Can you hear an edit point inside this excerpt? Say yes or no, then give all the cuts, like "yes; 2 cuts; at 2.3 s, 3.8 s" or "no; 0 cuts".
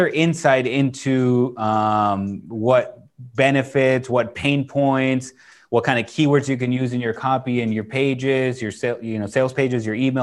no; 0 cuts